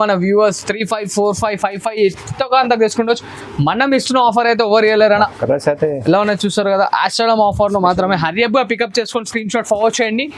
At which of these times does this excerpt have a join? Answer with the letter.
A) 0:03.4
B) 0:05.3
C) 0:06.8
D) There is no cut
B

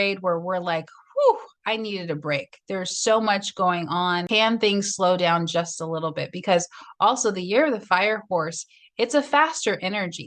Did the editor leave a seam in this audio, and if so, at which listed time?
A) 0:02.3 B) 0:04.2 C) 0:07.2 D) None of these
B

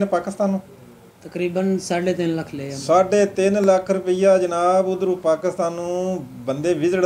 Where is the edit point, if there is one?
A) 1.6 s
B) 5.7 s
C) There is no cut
C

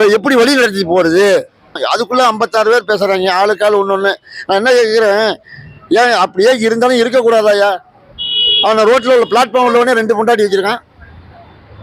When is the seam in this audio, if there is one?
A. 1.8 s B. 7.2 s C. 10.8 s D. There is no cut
A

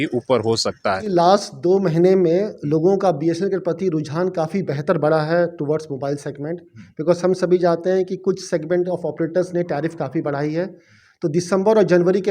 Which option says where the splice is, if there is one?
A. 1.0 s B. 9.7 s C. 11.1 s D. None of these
A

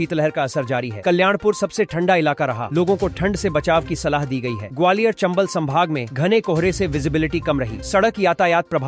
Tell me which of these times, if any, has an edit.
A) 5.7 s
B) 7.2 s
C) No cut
C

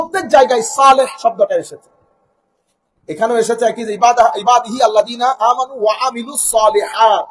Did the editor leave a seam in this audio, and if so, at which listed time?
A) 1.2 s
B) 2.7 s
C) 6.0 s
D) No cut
D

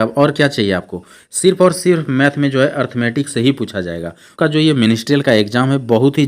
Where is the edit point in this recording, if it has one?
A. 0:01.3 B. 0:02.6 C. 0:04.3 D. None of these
C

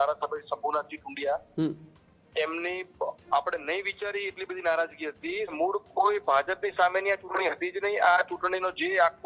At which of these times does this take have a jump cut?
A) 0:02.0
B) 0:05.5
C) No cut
B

